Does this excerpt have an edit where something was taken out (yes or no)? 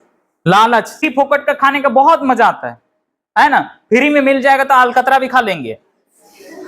yes